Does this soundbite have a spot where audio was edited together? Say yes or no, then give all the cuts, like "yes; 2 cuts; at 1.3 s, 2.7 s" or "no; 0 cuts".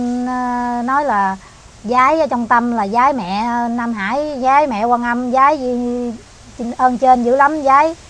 no; 0 cuts